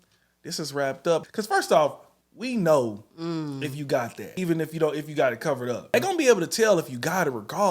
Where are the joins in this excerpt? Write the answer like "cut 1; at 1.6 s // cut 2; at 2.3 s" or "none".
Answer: cut 1; at 1.3 s // cut 2; at 4.2 s // cut 3; at 5.9 s